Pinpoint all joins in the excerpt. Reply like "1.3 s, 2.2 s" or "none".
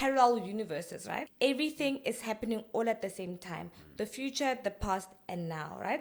1.3 s